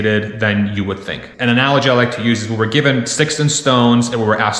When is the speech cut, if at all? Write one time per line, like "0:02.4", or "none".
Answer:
0:01.3